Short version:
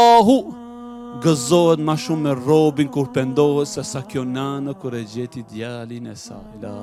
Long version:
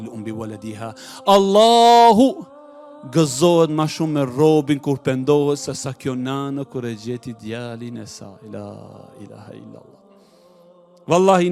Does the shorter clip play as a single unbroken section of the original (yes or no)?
yes